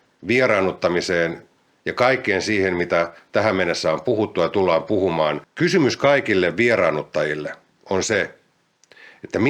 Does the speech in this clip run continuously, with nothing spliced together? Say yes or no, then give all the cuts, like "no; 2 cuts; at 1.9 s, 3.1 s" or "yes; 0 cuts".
no; 1 cut; at 5.5 s